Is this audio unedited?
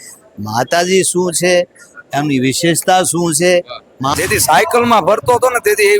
no; 1 cut; at 4.1 s

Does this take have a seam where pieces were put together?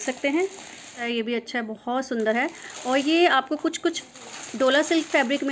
no; 0 cuts

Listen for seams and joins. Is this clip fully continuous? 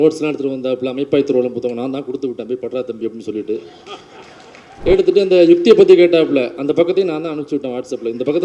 yes; 0 cuts

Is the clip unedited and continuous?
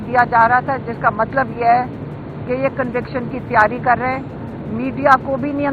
yes; 0 cuts

